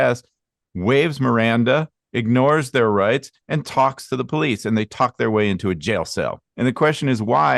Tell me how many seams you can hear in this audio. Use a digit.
1